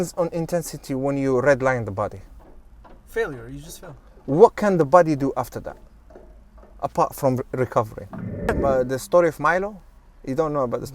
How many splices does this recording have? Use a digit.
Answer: 1